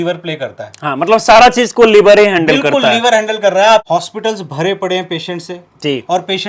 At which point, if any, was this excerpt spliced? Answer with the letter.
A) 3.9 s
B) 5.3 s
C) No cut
A